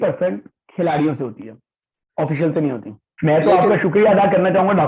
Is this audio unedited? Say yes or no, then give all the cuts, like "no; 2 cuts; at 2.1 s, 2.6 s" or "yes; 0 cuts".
no; 1 cut; at 3.1 s